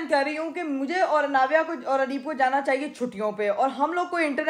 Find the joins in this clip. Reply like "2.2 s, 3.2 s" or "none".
none